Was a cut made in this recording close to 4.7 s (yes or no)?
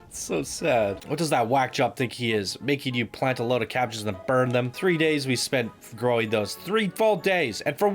yes